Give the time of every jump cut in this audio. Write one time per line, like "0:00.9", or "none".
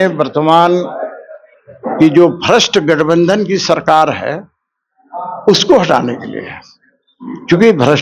none